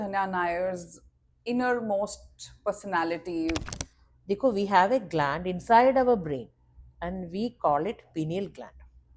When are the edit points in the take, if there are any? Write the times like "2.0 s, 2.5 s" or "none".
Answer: 3.8 s